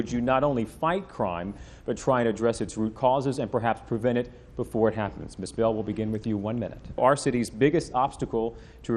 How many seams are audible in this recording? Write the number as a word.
one